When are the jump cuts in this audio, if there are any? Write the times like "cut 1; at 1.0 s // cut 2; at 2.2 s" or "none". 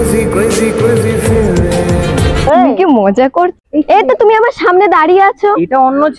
cut 1; at 3.6 s